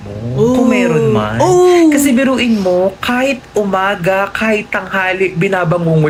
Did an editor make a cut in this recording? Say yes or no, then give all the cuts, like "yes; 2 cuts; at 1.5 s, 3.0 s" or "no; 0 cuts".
no; 0 cuts